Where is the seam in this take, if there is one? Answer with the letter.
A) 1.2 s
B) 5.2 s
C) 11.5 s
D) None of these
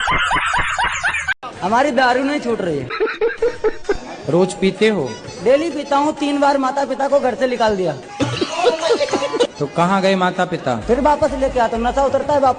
A